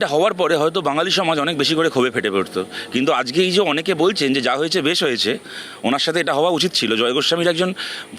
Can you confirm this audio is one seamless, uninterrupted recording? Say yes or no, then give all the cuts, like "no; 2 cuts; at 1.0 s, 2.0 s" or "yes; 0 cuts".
yes; 0 cuts